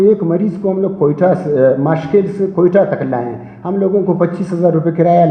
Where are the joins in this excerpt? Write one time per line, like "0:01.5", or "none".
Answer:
none